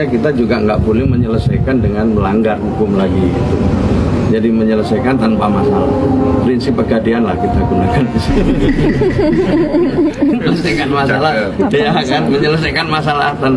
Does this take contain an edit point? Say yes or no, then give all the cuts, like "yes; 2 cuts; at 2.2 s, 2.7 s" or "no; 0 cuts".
no; 0 cuts